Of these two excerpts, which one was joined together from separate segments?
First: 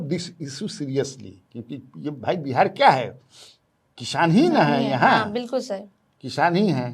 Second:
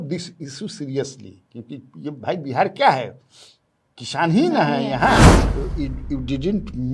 second; 1 cut; at 5.2 s

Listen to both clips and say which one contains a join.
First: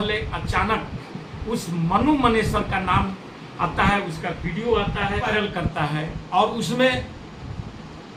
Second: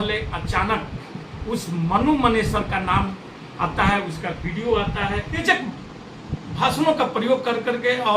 second; 1 cut; at 5.4 s

